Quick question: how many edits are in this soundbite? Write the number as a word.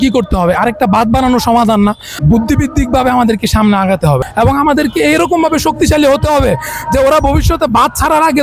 two